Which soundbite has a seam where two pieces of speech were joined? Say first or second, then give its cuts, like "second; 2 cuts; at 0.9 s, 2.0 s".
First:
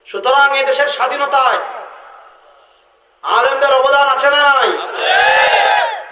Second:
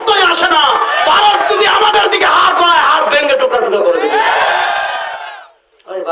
second; 1 cut; at 5.2 s